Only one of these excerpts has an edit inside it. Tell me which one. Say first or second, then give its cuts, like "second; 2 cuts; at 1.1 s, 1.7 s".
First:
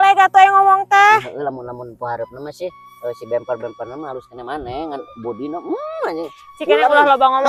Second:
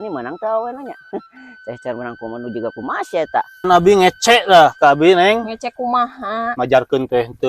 second; 1 cut; at 3.7 s